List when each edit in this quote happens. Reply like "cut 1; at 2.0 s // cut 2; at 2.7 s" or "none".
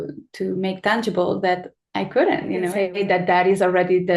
cut 1; at 2.7 s